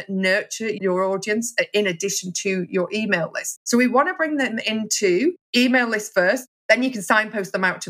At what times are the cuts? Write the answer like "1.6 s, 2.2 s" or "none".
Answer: 5.4 s